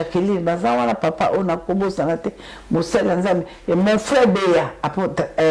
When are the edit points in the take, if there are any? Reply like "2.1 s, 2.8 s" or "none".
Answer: none